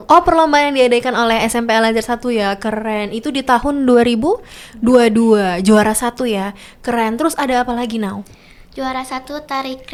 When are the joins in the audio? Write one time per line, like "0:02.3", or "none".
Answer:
none